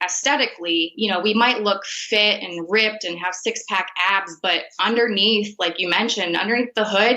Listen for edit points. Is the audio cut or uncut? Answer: cut